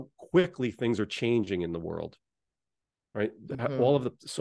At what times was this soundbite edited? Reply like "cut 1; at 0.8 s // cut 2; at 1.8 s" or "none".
none